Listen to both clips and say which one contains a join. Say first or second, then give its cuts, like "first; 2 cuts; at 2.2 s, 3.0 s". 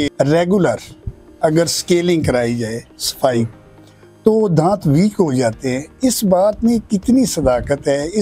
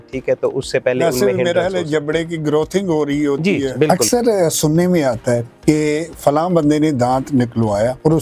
second; 1 cut; at 3.9 s